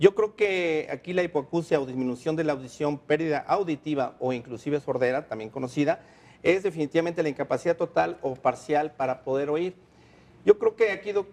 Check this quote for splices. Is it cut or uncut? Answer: cut